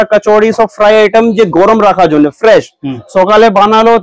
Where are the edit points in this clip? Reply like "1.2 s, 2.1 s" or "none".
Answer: none